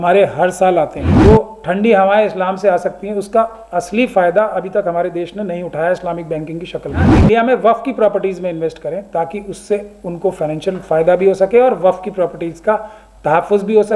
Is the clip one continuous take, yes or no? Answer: no